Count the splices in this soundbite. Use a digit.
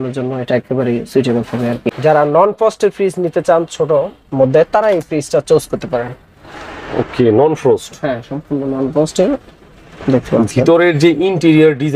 1